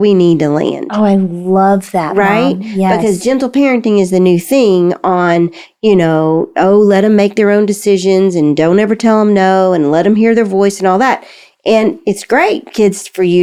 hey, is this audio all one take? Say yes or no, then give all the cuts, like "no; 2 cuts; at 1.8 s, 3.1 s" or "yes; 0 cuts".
yes; 0 cuts